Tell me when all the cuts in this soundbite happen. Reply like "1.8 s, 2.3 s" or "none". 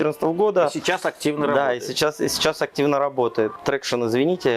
3.5 s